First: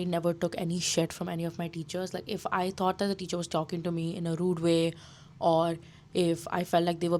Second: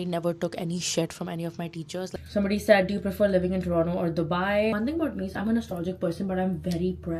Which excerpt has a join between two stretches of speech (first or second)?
second